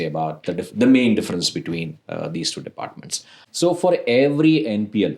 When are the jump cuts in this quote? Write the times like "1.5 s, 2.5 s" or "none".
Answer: 3.5 s